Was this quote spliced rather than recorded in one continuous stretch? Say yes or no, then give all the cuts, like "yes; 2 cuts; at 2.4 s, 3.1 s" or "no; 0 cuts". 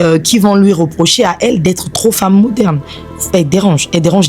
no; 0 cuts